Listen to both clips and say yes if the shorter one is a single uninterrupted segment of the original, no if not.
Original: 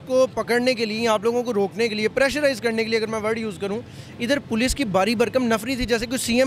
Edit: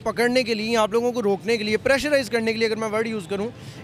yes